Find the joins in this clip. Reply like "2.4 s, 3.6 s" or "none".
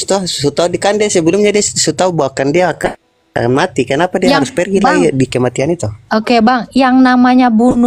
none

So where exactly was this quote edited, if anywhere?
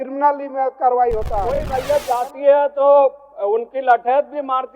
1.7 s

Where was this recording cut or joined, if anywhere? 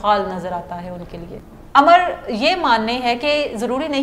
1.4 s

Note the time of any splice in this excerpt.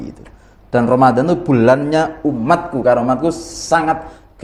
none

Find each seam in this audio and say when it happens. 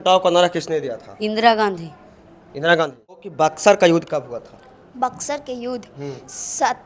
3.6 s

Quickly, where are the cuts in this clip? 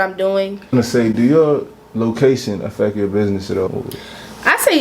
0.7 s, 3.7 s

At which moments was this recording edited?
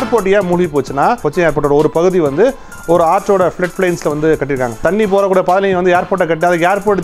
1.2 s, 4.8 s

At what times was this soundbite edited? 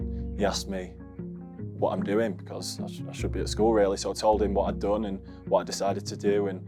none

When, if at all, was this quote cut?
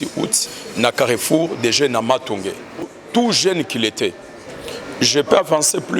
2.8 s

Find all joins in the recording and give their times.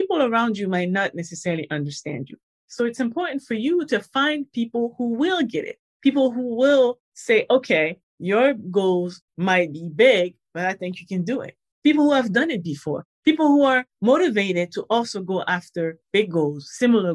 2.4 s

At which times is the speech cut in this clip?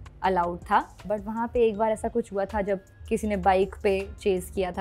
1.0 s

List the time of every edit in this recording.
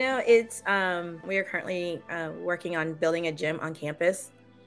1.3 s

